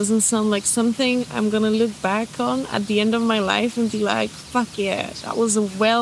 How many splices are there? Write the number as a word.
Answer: zero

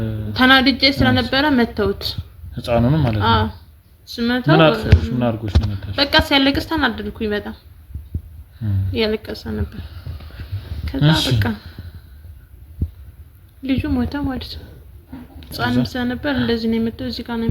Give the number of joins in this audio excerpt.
one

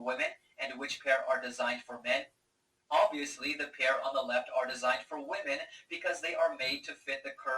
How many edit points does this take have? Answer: one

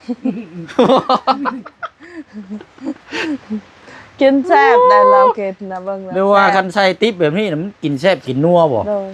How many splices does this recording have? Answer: zero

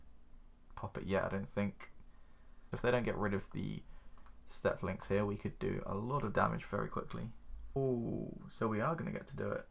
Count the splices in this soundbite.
two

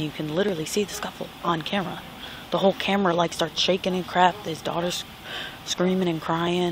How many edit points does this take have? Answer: zero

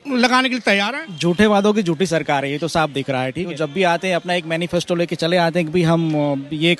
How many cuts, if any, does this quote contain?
two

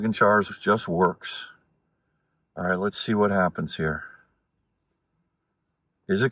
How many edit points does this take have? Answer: zero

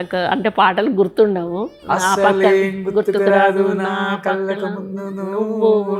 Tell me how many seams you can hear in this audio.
zero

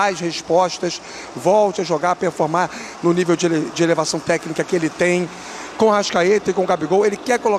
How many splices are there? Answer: zero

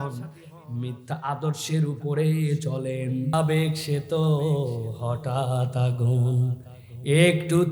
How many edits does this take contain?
one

